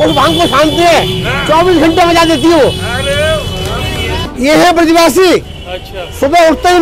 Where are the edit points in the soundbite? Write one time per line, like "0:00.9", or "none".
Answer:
0:04.3

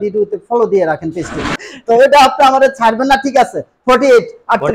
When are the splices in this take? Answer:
0:01.5

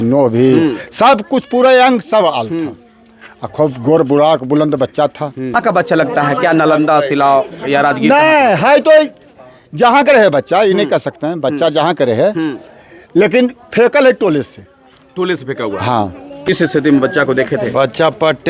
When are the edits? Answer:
0:05.5
0:16.5

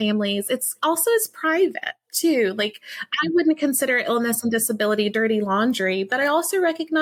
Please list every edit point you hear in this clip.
none

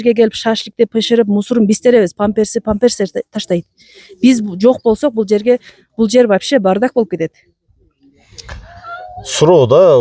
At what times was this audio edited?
none

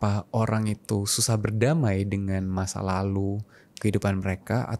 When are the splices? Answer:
none

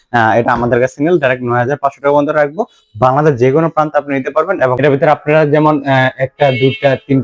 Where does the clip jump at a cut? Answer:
0:04.8

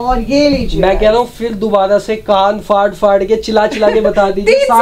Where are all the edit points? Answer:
none

